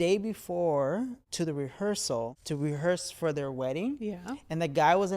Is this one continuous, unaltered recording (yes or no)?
no